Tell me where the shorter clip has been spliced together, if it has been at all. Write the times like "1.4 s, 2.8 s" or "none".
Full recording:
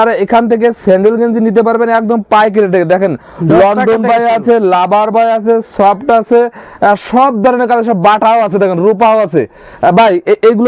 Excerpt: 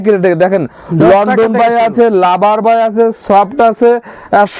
none